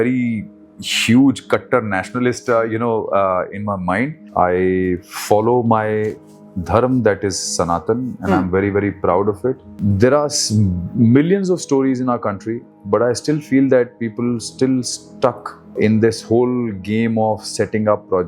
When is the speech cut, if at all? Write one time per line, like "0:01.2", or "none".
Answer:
0:04.2
0:09.7
0:15.7